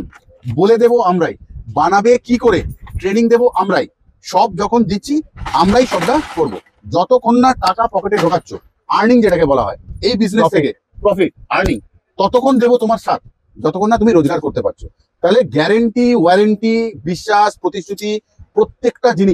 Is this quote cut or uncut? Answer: uncut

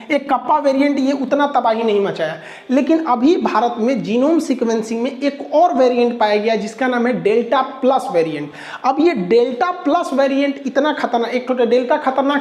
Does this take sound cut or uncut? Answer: uncut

